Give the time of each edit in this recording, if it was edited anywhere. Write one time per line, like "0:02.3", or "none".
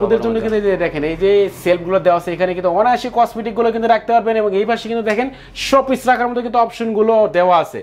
none

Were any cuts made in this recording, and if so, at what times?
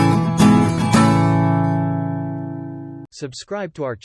0:03.0

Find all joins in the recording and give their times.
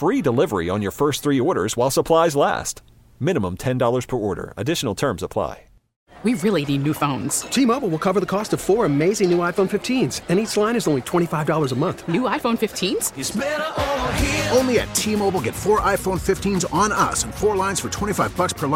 0:06.1

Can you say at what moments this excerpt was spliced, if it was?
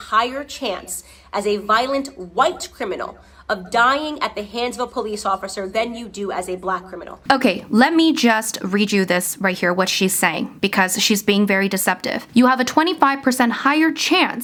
none

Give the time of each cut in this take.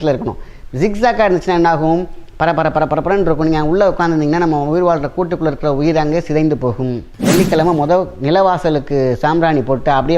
0:07.1

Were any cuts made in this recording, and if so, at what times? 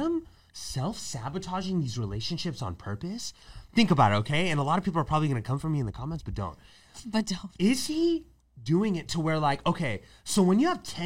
none

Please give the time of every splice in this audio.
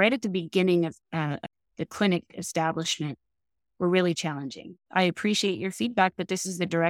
0:04.7

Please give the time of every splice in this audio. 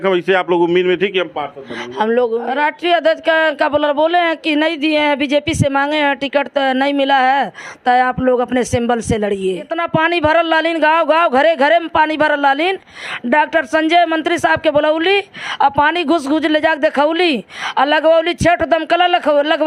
0:02.5
0:09.8

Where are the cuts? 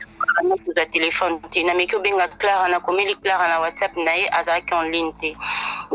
none

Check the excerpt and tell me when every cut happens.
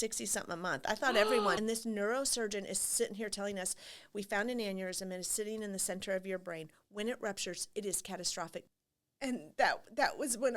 0:01.6
0:08.7

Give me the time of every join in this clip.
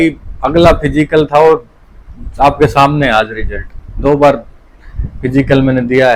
none

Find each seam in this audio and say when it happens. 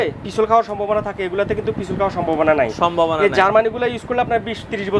none

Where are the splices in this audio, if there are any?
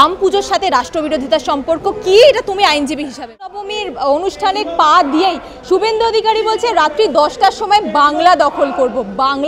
0:03.7

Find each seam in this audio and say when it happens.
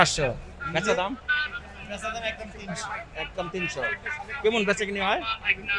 none

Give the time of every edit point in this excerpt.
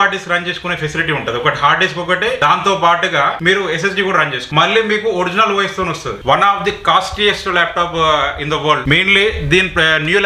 0:02.4
0:03.4
0:04.4
0:06.1
0:08.8

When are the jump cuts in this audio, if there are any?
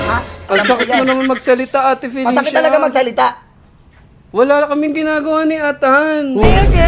none

